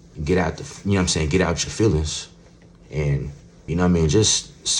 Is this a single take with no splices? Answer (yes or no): no